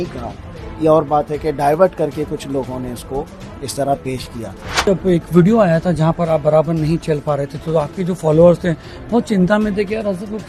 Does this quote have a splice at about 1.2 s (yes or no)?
no